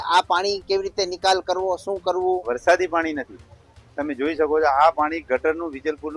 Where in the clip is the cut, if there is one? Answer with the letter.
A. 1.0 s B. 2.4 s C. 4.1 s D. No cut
B